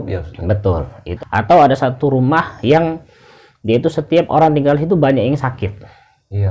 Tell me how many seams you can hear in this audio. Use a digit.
1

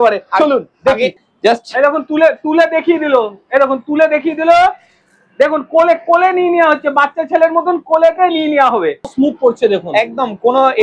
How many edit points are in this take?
2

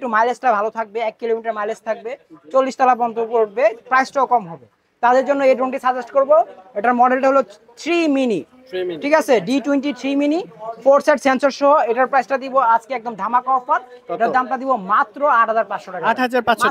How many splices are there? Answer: 0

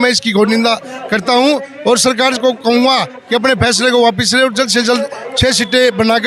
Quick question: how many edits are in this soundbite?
0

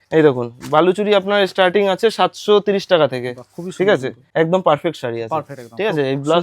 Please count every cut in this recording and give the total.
1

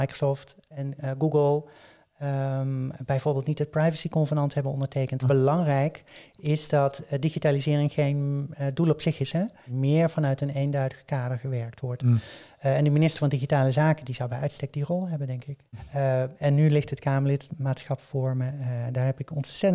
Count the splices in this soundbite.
3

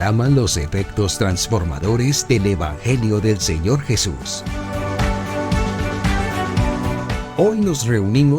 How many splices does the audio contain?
2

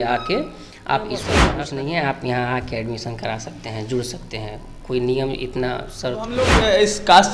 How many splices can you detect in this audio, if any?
2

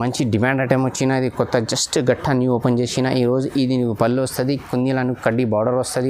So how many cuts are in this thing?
0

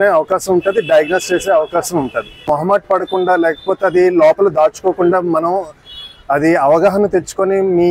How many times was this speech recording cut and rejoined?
1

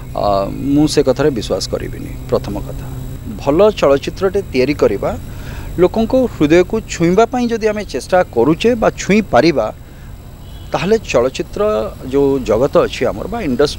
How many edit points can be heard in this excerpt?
1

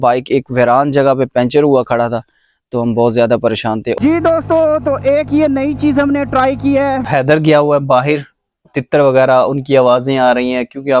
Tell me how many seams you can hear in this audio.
3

